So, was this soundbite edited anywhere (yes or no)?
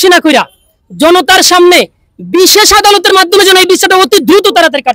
no